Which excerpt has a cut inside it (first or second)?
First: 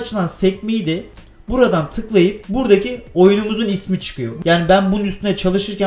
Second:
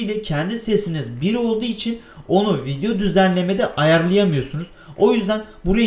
first